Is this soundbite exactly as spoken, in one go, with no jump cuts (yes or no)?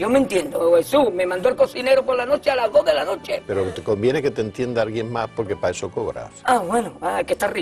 no